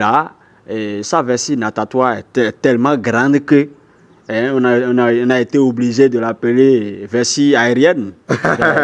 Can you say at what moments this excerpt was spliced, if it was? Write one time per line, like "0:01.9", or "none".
none